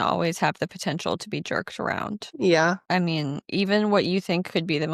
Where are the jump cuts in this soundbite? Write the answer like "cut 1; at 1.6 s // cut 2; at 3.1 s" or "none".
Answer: none